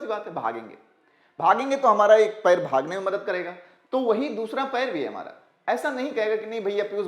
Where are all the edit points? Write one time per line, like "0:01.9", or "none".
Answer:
none